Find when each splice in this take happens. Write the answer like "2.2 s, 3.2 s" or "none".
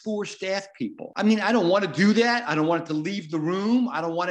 1.0 s

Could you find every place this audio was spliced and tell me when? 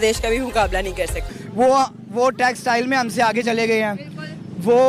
1.2 s

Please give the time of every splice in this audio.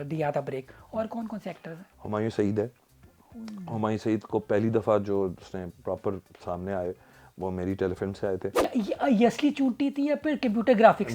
8.7 s

